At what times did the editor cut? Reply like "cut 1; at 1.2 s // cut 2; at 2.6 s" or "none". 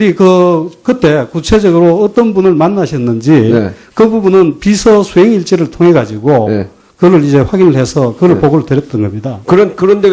cut 1; at 1.9 s